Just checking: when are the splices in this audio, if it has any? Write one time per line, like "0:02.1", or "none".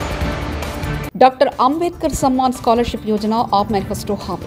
0:01.0